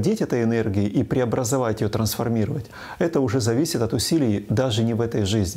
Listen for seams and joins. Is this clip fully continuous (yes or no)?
yes